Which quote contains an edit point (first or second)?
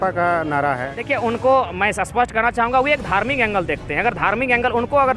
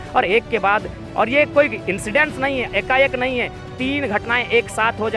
first